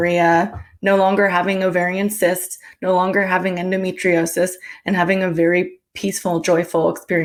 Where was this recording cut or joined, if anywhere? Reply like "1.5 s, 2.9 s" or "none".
none